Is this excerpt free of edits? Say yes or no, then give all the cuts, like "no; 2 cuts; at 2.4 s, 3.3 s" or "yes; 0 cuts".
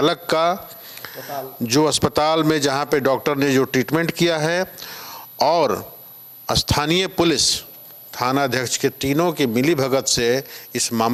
yes; 0 cuts